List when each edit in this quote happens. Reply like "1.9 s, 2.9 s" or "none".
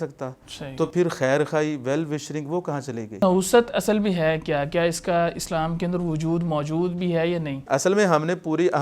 3.2 s, 7.6 s